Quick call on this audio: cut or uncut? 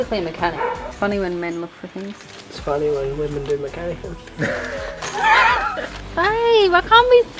cut